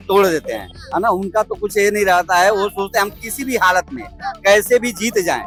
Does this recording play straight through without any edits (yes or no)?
yes